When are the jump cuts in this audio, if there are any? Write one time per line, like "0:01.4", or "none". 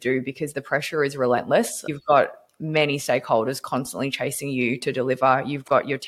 0:01.8